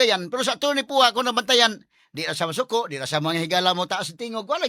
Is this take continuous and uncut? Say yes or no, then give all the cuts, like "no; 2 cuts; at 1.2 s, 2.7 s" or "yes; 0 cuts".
yes; 0 cuts